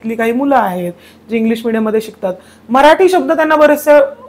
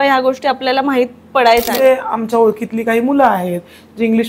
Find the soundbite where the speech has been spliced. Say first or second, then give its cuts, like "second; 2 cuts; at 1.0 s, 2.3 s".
second; 1 cut; at 1.7 s